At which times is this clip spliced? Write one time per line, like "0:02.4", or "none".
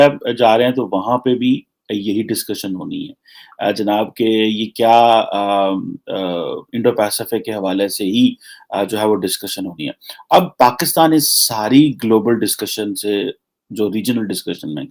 none